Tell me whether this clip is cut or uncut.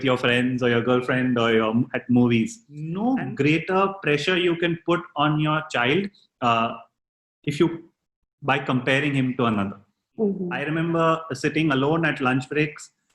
cut